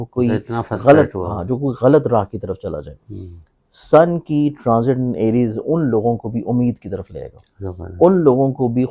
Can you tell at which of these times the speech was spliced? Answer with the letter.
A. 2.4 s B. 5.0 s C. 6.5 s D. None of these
D